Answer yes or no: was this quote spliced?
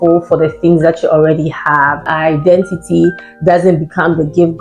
yes